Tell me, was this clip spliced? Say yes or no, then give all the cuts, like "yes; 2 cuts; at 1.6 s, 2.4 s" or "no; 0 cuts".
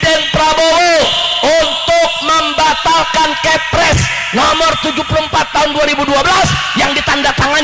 no; 0 cuts